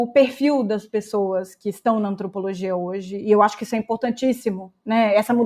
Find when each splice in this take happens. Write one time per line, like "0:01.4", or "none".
none